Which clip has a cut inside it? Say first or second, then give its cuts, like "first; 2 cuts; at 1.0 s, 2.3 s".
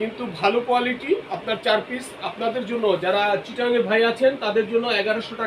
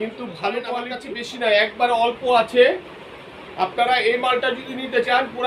second; 1 cut; at 0.9 s